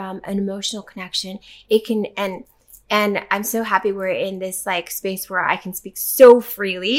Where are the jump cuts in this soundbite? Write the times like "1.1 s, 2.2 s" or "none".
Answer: none